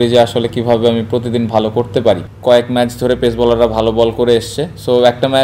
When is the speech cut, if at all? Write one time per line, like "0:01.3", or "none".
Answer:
0:02.3